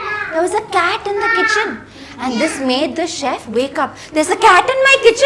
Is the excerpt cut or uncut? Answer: uncut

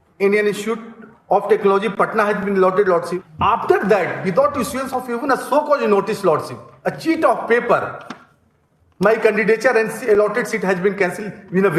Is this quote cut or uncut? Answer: cut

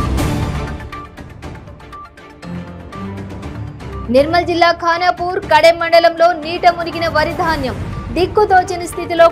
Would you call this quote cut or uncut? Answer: uncut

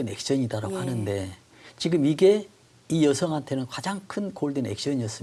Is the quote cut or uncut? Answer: uncut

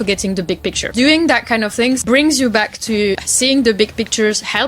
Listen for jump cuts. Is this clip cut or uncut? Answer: cut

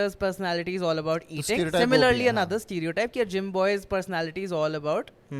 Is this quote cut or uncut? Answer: uncut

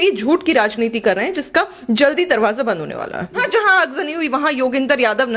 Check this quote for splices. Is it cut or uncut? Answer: cut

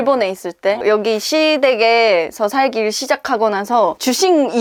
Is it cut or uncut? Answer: uncut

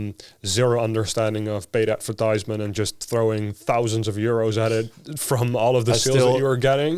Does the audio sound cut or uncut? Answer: uncut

